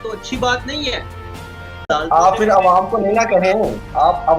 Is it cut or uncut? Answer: cut